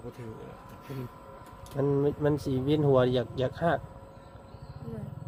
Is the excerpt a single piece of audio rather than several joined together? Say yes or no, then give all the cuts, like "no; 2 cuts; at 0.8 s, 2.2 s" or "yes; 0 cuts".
yes; 0 cuts